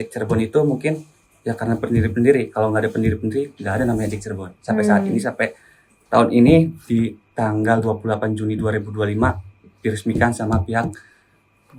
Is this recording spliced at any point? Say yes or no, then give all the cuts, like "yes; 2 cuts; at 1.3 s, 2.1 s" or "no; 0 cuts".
no; 0 cuts